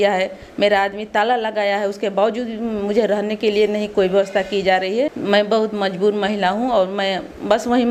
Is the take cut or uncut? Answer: uncut